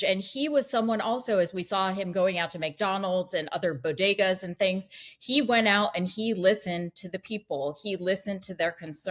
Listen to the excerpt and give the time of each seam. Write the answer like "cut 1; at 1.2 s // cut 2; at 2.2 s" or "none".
none